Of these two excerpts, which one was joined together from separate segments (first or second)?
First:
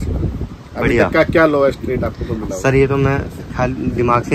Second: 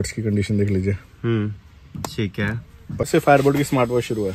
second